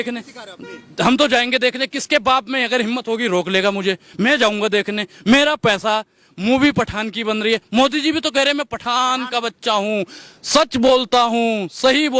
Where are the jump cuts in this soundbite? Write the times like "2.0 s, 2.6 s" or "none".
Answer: none

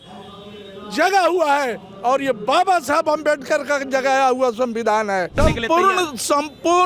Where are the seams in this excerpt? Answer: 5.4 s

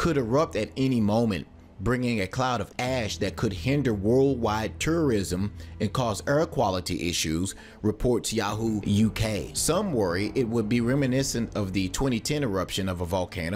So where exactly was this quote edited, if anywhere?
10.9 s

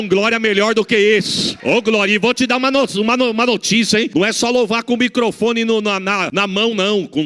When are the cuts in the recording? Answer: 1.5 s, 4.1 s, 6.3 s

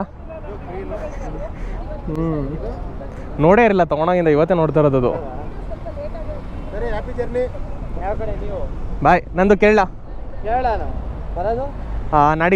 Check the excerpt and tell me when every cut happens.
none

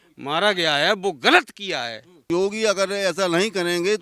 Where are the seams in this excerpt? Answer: 2.3 s

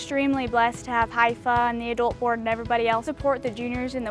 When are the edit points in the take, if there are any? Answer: 3.1 s

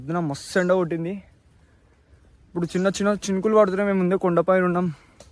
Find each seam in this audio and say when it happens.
none

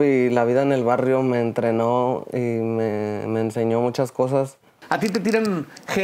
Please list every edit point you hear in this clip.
4.8 s

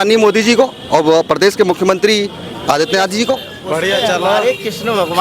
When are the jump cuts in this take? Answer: 3.5 s

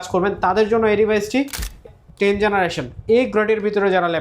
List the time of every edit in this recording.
1.8 s

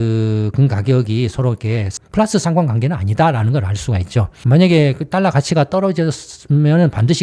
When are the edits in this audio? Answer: 1.9 s, 4.3 s

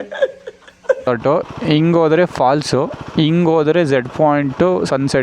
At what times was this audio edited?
1.1 s

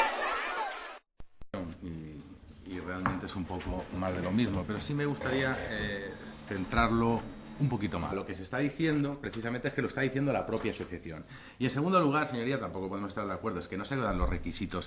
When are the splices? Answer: none

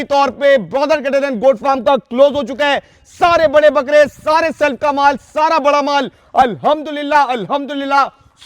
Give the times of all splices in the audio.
none

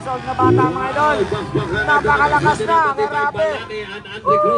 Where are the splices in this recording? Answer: none

